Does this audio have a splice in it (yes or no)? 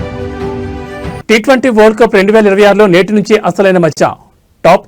yes